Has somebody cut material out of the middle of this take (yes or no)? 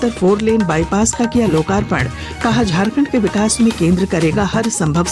no